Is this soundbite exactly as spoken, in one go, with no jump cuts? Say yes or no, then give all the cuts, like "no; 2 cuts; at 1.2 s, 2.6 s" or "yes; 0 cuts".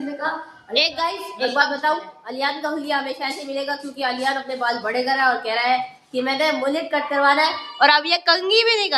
yes; 0 cuts